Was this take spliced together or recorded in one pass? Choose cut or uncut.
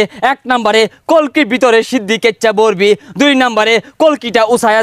uncut